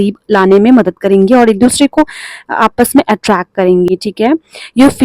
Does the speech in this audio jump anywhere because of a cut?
no; 0 cuts

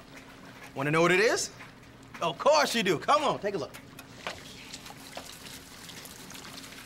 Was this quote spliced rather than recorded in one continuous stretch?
yes; 1 cut; at 4.4 s

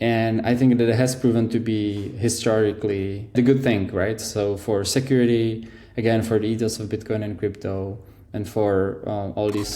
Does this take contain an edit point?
yes; 1 cut; at 3.3 s

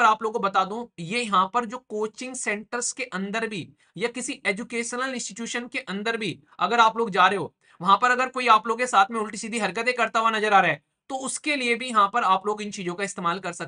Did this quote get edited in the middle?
no; 0 cuts

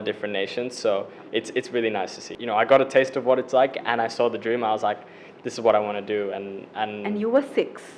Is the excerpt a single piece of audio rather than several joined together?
no; 1 cut; at 2.2 s

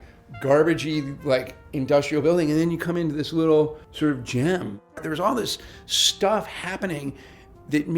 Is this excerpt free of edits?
no; 2 cuts; at 3.8 s, 5.0 s

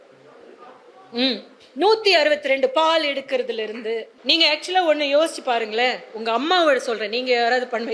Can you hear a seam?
yes; 1 cut; at 4.1 s

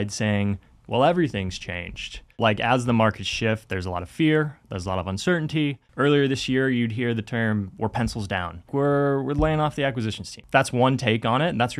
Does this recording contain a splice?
yes; 4 cuts; at 2.4 s, 5.8 s, 8.7 s, 10.3 s

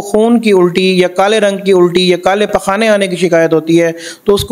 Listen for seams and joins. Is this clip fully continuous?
yes; 0 cuts

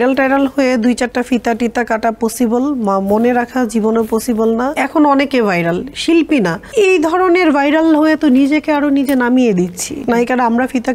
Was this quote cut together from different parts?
yes; 3 cuts; at 4.8 s, 6.6 s, 9.9 s

